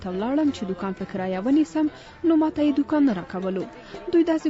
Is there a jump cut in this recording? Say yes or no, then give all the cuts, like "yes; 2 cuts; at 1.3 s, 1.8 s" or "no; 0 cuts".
no; 0 cuts